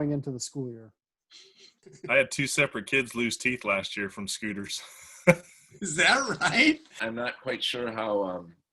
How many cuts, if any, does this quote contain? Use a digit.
2